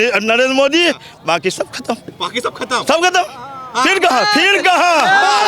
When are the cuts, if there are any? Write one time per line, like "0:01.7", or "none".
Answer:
none